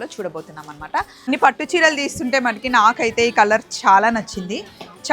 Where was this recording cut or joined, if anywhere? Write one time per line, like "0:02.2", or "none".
0:01.3